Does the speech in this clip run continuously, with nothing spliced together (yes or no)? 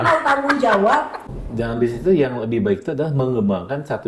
no